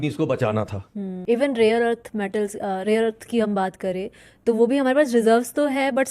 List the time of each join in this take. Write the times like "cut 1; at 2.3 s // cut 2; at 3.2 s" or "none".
cut 1; at 1.2 s